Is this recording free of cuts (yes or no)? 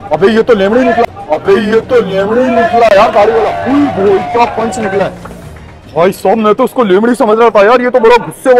yes